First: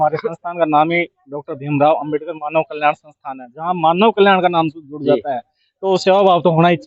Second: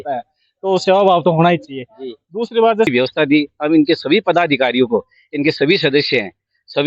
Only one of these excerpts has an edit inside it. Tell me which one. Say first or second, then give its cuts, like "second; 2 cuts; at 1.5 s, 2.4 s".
second; 1 cut; at 2.9 s